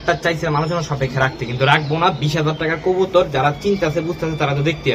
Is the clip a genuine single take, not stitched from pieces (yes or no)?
yes